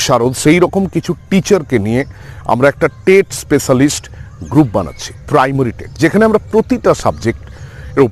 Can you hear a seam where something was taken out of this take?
no; 0 cuts

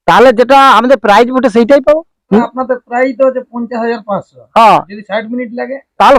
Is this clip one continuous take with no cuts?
no; 1 cut; at 2.5 s

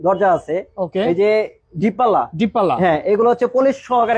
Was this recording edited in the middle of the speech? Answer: no; 0 cuts

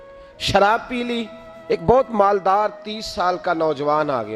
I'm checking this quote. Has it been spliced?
yes; 1 cut; at 1.8 s

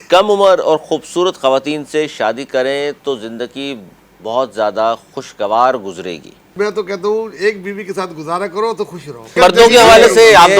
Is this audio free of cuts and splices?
no; 2 cuts; at 6.5 s, 9.4 s

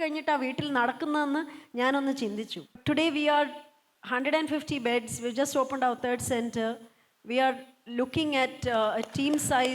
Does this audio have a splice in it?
yes; 1 cut; at 2.8 s

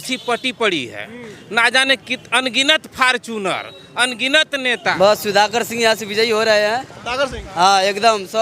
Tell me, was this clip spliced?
yes; 1 cut; at 4.9 s

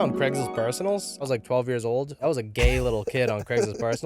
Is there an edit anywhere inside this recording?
yes; 2 cuts; at 1.2 s, 2.2 s

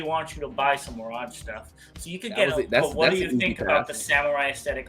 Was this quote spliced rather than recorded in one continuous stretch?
yes; 1 cut; at 2.5 s

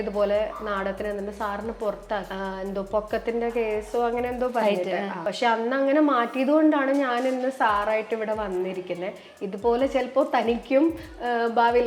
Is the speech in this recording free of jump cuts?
no; 2 cuts; at 2.3 s, 5.2 s

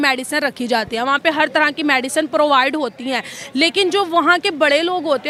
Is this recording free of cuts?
yes; 0 cuts

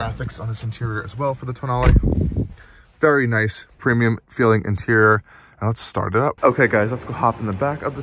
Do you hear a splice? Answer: yes; 1 cut; at 6.4 s

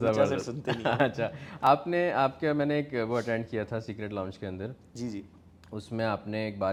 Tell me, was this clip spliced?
no; 0 cuts

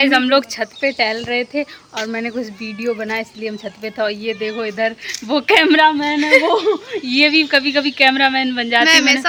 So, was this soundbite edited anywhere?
no; 0 cuts

